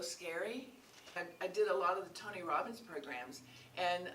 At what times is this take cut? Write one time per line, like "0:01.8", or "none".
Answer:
0:01.1